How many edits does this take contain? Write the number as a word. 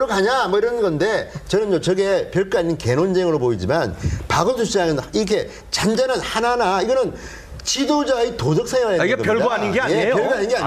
one